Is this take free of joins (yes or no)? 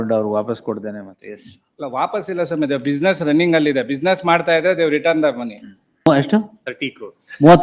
no